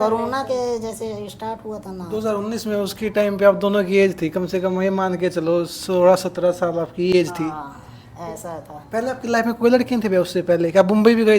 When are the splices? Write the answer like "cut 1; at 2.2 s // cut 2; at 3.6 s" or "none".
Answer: none